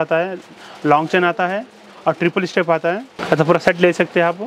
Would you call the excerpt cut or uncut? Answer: uncut